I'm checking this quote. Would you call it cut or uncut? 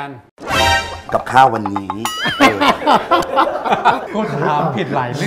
cut